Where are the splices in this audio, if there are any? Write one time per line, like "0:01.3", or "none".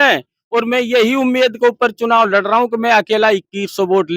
none